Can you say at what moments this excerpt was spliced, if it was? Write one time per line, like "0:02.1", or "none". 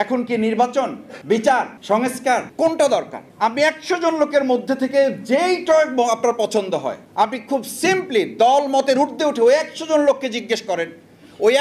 0:01.1
0:02.1
0:03.2
0:07.0

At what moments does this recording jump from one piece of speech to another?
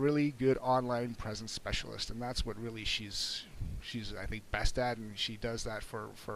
none

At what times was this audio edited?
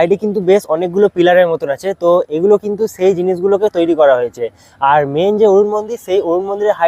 none

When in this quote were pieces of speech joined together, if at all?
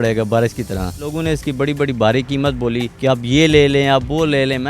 0:01.1
0:02.9

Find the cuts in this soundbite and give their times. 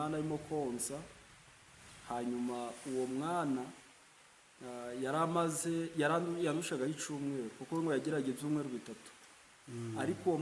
none

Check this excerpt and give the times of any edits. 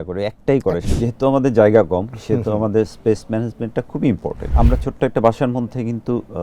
0:00.8
0:04.5

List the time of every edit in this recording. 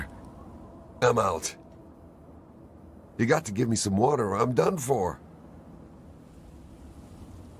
none

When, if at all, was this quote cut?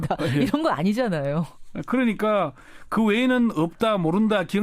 0:02.5

